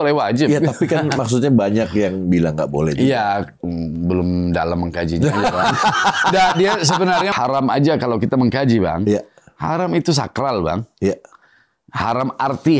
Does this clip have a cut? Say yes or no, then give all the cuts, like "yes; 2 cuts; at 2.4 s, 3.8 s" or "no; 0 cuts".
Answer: yes; 1 cut; at 7.3 s